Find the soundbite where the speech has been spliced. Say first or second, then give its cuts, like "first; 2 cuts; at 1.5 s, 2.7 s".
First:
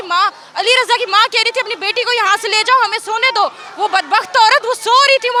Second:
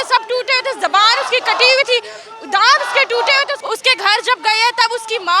second; 1 cut; at 3.6 s